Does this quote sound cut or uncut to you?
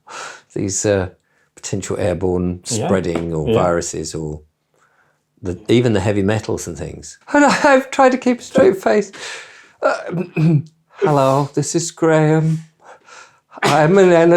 cut